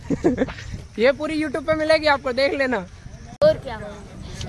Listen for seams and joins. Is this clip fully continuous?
no; 1 cut; at 3.4 s

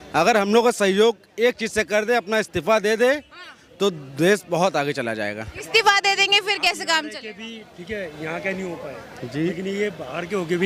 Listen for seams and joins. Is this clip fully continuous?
yes; 0 cuts

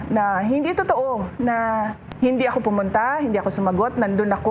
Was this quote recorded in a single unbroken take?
yes; 0 cuts

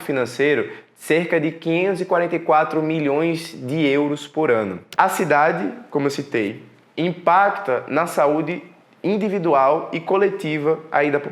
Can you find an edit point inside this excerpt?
yes; 1 cut; at 4.8 s

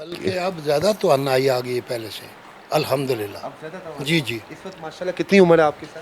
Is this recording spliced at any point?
no; 0 cuts

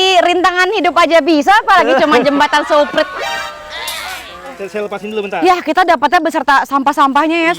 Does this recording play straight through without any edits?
no; 1 cut; at 4.5 s

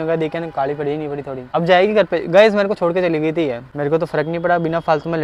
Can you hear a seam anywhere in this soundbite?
yes; 2 cuts; at 1.4 s, 3.6 s

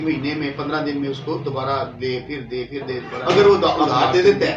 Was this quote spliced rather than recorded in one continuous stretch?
yes; 1 cut; at 3.1 s

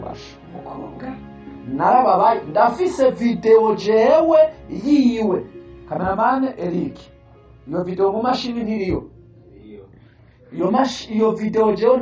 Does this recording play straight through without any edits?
yes; 0 cuts

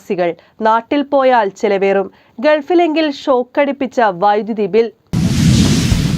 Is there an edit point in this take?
yes; 1 cut; at 5.0 s

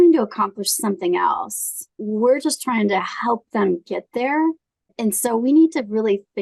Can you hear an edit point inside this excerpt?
yes; 2 cuts; at 2.0 s, 4.9 s

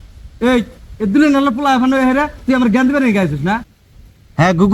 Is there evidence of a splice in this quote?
yes; 1 cut; at 3.7 s

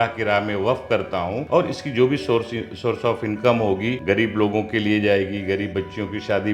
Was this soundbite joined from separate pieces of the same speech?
yes; 2 cuts; at 1.4 s, 4.0 s

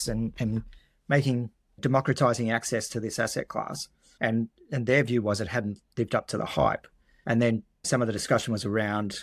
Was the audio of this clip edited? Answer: no; 0 cuts

